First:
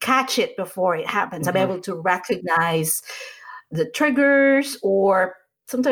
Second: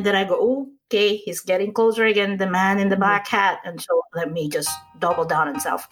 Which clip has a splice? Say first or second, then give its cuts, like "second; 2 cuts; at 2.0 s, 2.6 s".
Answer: second; 1 cut; at 4.8 s